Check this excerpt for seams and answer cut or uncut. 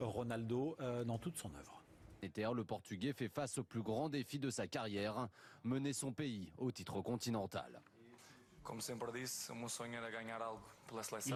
uncut